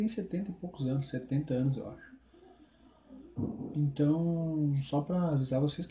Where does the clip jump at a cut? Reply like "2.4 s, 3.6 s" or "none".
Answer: 2.1 s